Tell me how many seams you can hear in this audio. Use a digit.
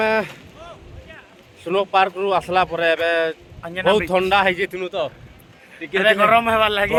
0